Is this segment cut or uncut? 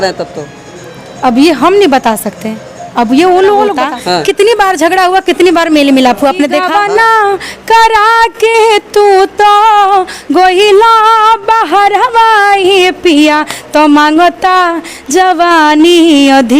cut